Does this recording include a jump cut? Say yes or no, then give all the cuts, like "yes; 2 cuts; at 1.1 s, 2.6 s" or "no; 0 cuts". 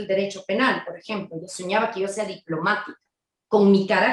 no; 0 cuts